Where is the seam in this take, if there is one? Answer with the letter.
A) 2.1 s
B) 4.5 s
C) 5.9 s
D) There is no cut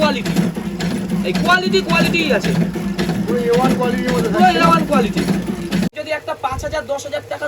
C